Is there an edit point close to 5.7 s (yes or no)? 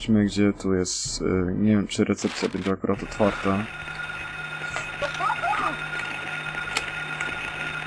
no